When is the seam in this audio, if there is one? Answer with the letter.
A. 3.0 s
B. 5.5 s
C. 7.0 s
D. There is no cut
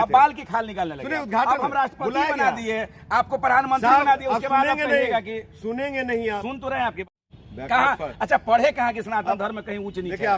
C